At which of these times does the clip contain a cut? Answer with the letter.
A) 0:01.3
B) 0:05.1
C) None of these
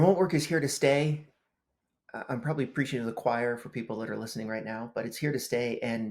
C